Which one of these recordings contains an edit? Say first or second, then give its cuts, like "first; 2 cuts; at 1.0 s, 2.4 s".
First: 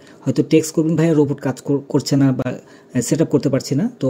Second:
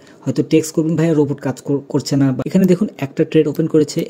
second; 1 cut; at 2.4 s